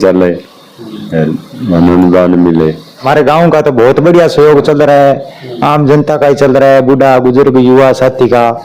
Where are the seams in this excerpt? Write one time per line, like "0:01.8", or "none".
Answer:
0:03.0